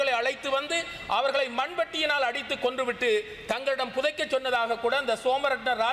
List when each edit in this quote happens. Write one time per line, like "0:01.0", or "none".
none